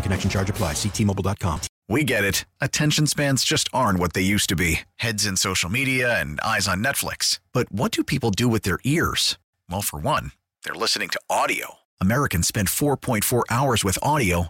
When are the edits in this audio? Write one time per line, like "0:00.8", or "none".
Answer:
0:01.7